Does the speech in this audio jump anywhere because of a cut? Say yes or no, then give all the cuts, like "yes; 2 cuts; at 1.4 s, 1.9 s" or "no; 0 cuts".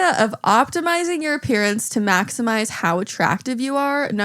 no; 0 cuts